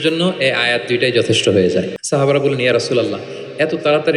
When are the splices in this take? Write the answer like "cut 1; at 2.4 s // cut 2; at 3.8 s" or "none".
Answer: cut 1; at 2.0 s